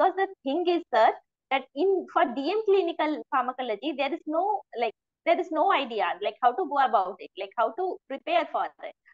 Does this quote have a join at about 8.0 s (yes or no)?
yes